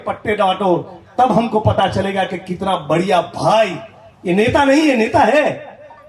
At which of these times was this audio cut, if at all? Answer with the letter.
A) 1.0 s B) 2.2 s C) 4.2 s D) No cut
D